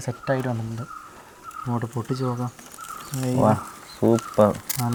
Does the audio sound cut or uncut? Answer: uncut